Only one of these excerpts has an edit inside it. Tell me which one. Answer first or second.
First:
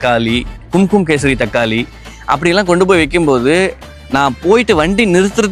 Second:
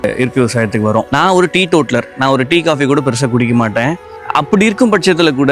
second